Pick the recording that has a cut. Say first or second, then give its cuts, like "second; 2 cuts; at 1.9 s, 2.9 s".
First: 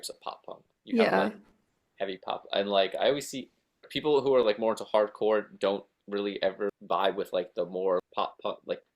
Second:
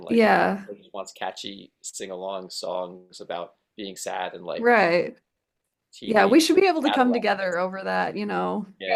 first; 3 cuts; at 3.9 s, 6.7 s, 8.0 s